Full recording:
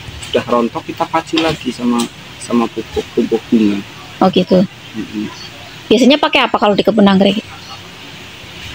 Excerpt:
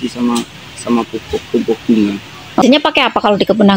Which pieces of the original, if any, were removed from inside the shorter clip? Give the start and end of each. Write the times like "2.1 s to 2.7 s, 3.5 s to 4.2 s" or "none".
4.3 s to 6.0 s

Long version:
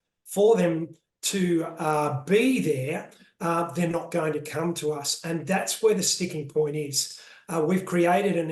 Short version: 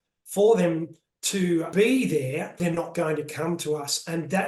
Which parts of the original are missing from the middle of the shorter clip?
1.7 s to 2.2 s, 3.1 s to 3.7 s

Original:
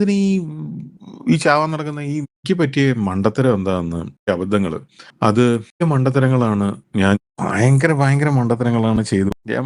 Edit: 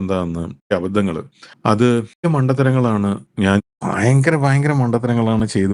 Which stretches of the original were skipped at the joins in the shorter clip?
none

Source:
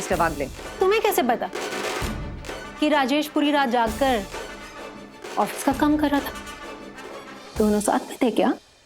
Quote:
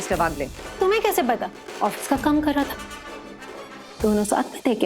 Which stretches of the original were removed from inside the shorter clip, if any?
1.6 s to 5.1 s

